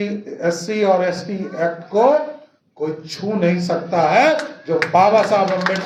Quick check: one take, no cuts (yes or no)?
yes